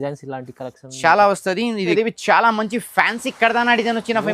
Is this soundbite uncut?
no; 1 cut; at 1.9 s

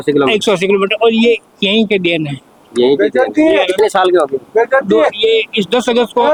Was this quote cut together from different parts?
no; 0 cuts

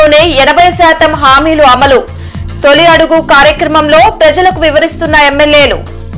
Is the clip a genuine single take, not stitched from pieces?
yes; 0 cuts

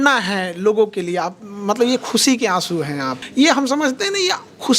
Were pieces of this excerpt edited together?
yes; 1 cut; at 3.2 s

